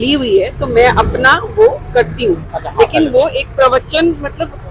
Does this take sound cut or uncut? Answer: uncut